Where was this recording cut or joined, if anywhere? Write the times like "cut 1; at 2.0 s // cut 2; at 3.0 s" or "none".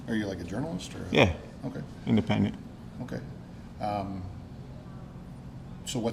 none